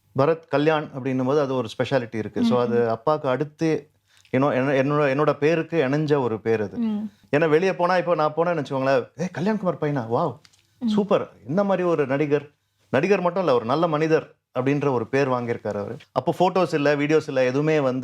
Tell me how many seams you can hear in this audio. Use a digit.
2